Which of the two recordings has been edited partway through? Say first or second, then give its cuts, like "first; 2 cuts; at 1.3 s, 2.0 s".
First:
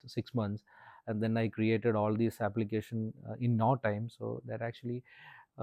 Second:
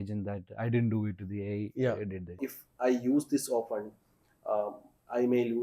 second; 1 cut; at 2.4 s